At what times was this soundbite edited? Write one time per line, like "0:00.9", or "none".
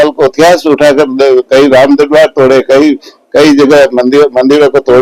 none